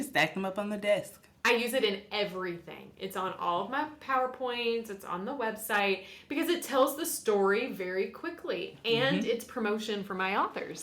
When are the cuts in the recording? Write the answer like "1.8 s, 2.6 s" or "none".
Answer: none